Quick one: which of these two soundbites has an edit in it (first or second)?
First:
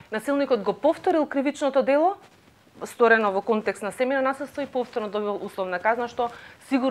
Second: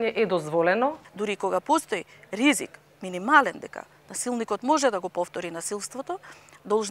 second